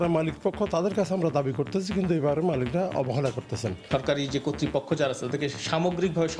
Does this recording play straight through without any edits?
no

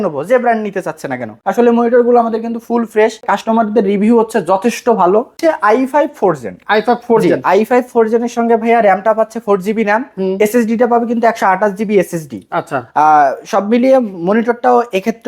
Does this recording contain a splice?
yes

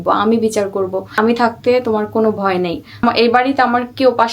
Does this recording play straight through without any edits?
no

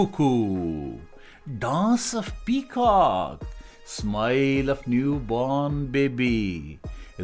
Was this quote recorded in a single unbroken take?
yes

